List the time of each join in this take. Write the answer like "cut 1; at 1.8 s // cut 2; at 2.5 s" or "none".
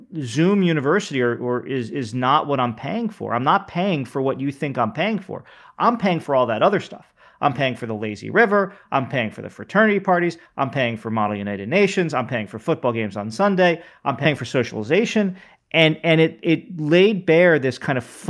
cut 1; at 14.2 s